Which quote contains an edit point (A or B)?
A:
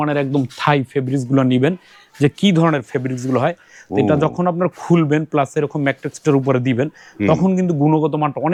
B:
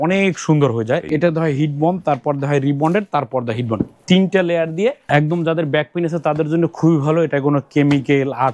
B